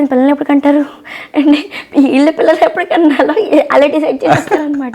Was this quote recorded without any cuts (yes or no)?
yes